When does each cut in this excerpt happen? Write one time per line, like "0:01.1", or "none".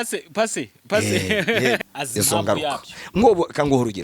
0:01.8

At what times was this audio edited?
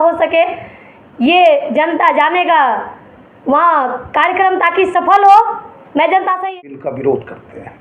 0:06.4

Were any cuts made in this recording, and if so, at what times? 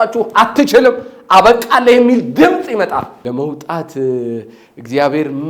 0:03.2

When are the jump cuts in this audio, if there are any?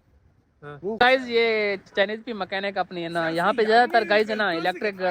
0:01.0

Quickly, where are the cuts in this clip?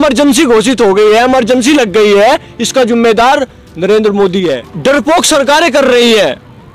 0:04.7

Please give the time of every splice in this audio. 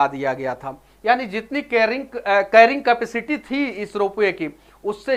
none

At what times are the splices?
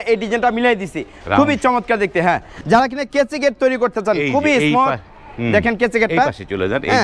none

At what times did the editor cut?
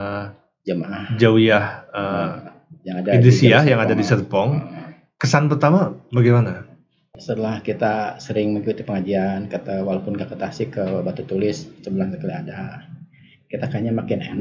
0:07.1

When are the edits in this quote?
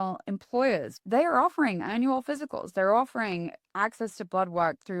0:00.9

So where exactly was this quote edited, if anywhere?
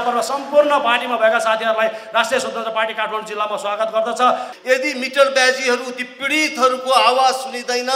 0:04.5

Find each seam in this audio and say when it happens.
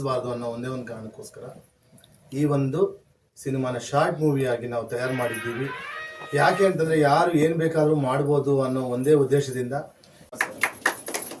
0:10.3

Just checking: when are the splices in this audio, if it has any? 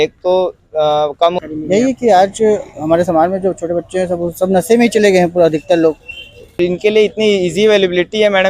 0:01.4
0:06.6

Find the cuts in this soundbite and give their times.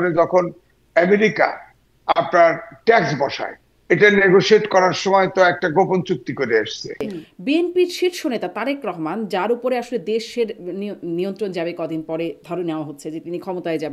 0:07.1

